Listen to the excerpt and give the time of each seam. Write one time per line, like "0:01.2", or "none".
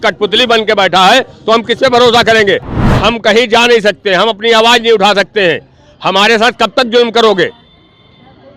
0:02.8